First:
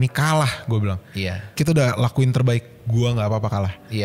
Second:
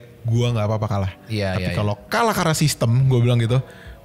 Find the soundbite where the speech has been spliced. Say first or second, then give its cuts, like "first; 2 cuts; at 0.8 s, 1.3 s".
first; 1 cut; at 1.5 s